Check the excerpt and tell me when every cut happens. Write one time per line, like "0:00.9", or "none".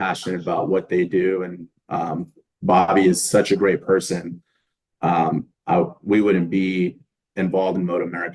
none